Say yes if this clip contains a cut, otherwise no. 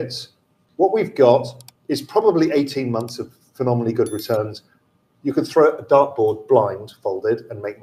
no